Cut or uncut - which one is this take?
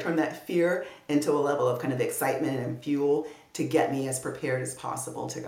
uncut